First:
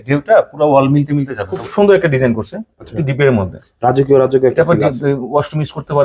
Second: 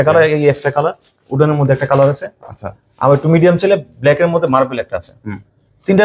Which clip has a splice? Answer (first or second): first